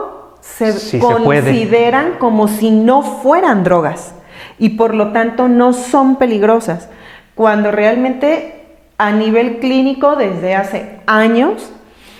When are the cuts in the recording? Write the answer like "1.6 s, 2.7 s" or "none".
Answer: none